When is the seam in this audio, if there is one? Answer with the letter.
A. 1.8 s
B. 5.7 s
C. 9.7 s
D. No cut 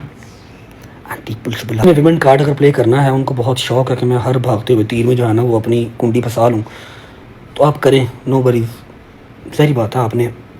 A